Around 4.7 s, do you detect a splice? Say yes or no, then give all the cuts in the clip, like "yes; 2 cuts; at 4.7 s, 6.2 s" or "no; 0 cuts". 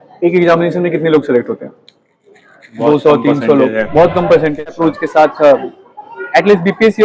yes; 1 cut; at 4.7 s